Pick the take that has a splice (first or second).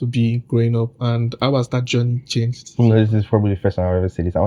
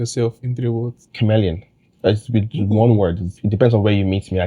second